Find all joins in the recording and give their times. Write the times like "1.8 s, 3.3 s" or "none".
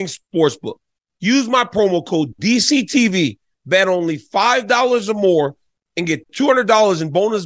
none

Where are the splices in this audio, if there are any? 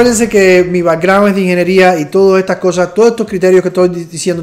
none

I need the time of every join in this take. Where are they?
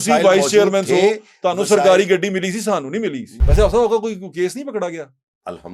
3.3 s

